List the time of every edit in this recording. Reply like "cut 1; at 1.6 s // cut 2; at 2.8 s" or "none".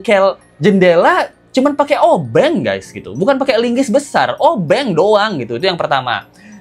none